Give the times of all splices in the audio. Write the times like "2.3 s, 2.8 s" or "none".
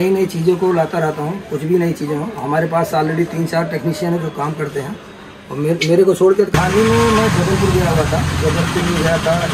6.5 s